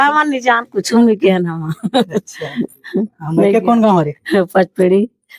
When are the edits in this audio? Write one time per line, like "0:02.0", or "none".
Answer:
none